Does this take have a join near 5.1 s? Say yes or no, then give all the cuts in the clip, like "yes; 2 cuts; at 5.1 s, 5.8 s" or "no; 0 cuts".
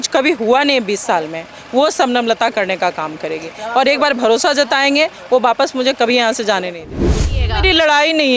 no; 1 cut; at 7.2 s